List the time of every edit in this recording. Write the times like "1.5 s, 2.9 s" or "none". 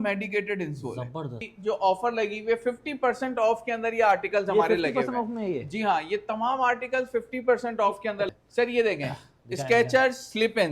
1.5 s, 8.3 s